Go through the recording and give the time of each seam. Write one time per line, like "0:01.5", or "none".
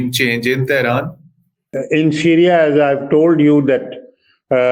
0:01.7